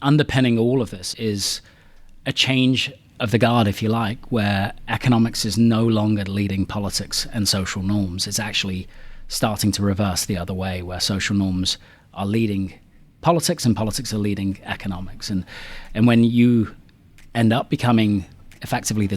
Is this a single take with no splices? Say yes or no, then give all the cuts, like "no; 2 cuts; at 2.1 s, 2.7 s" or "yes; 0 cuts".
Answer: no; 1 cut; at 1.0 s